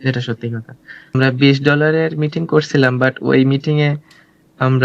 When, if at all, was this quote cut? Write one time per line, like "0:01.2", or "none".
0:01.1